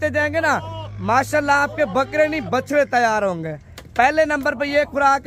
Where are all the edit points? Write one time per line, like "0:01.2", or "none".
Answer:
none